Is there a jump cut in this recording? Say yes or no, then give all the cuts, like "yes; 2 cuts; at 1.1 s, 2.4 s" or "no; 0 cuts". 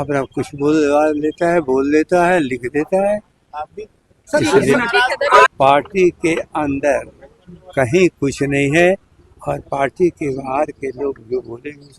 yes; 1 cut; at 5.5 s